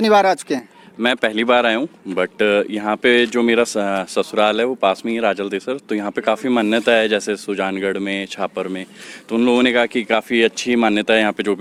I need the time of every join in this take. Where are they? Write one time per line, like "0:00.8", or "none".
none